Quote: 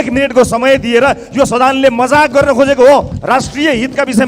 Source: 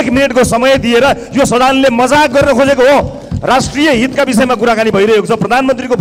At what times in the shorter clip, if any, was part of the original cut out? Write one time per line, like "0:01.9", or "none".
0:03.1